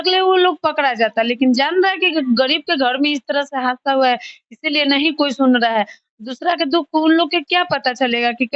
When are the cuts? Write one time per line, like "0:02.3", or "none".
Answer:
none